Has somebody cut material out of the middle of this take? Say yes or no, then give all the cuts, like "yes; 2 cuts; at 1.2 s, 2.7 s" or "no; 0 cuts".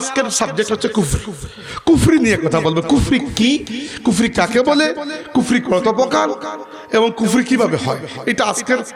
no; 0 cuts